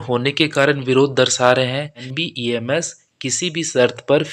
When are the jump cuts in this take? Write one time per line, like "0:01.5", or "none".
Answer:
0:02.2